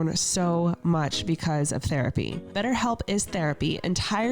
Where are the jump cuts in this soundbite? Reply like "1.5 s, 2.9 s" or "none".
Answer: 2.4 s